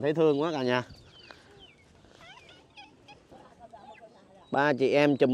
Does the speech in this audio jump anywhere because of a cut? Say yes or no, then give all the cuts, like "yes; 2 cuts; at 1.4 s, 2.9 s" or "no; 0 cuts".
yes; 1 cut; at 3.3 s